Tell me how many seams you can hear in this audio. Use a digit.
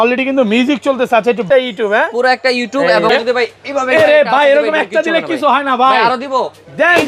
2